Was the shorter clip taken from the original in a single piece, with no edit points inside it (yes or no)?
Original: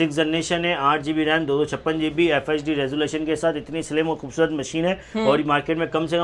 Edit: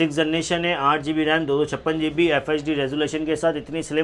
yes